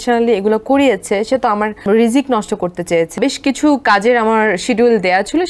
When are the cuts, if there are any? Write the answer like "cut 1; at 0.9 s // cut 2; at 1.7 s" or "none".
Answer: cut 1; at 1.8 s // cut 2; at 3.2 s